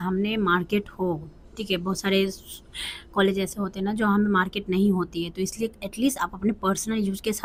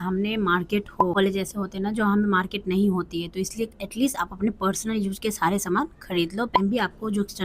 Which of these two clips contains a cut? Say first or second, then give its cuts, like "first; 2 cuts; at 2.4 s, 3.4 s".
second; 2 cuts; at 1.1 s, 6.5 s